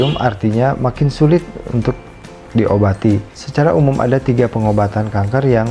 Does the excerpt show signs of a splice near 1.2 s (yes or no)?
no